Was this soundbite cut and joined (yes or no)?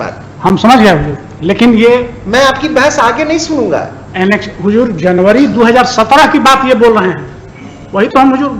no